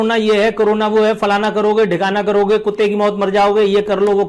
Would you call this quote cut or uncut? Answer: uncut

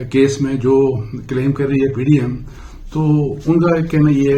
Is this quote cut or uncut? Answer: uncut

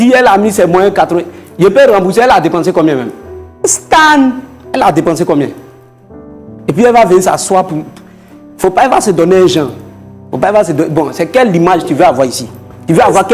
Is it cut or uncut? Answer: uncut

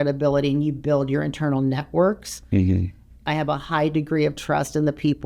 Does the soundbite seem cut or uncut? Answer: cut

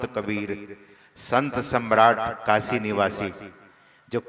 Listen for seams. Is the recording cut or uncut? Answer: uncut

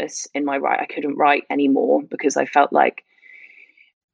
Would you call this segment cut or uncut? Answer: uncut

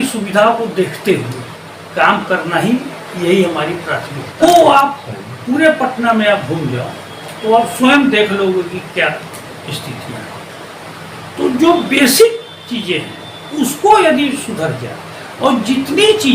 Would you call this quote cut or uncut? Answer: cut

